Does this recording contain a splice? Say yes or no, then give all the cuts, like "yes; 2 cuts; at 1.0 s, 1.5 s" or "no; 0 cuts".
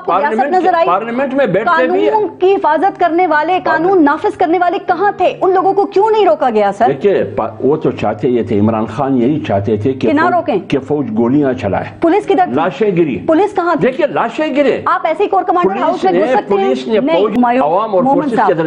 no; 0 cuts